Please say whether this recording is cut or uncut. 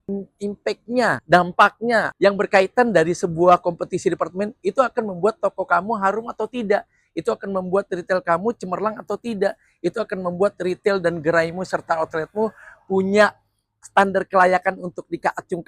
cut